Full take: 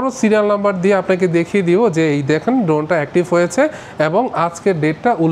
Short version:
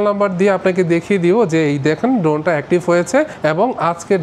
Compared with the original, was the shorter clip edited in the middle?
yes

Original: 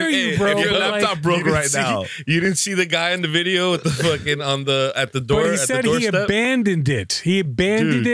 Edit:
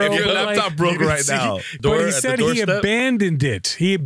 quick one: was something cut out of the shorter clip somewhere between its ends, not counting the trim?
yes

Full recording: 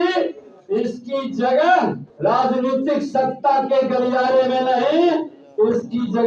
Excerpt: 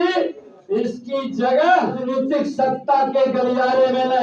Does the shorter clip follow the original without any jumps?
no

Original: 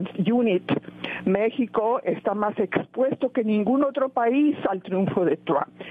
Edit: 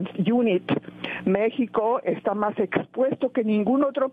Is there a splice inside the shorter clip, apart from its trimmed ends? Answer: no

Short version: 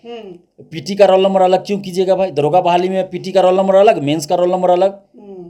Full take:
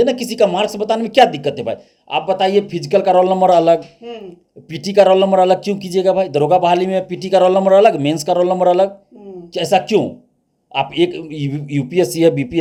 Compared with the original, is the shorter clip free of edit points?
yes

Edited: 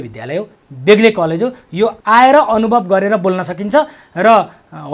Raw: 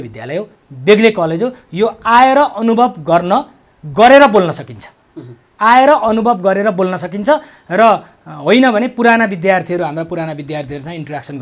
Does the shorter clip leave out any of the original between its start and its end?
yes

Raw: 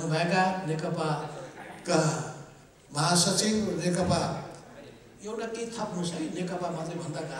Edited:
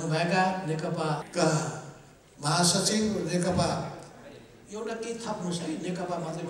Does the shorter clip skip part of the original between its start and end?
yes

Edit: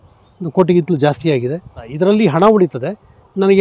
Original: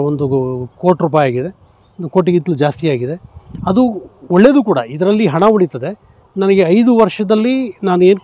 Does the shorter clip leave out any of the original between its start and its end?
yes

